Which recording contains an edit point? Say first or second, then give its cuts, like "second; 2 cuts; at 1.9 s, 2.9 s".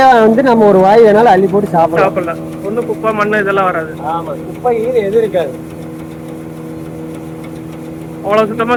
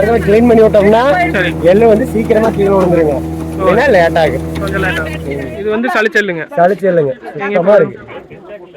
second; 1 cut; at 5.3 s